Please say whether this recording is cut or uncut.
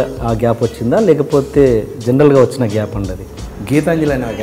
cut